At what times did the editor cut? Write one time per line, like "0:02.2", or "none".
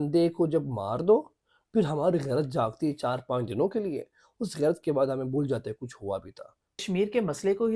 0:06.8